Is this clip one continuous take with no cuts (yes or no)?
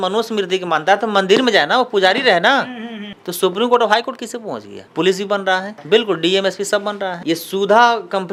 yes